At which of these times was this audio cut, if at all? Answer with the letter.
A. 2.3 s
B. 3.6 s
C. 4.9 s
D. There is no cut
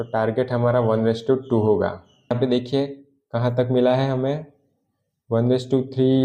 A